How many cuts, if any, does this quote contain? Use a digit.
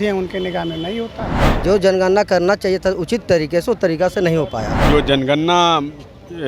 2